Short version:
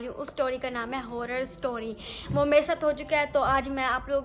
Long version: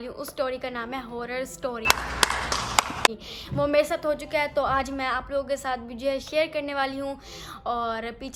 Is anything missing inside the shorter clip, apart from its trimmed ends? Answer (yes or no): yes